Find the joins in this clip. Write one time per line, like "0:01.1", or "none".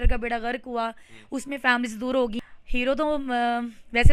0:02.4

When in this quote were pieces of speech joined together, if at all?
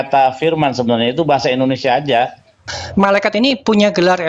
0:02.7

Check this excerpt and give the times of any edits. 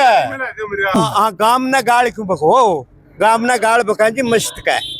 0:01.0

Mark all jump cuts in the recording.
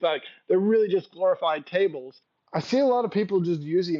0:02.4

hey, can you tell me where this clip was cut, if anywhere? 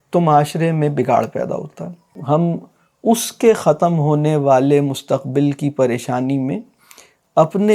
0:02.1

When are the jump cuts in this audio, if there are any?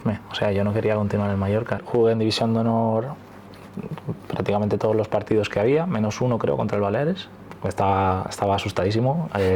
0:01.8
0:07.6

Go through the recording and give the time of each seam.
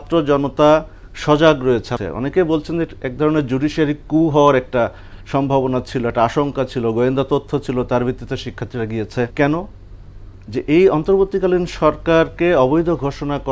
0:01.9
0:09.3

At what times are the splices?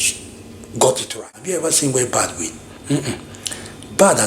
0:01.4

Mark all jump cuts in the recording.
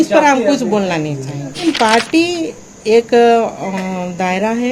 0:01.6

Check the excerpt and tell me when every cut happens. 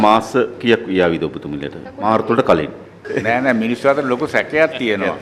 0:01.8

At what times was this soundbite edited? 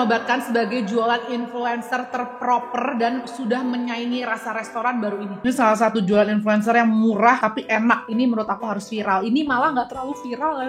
0:05.4
0:08.0

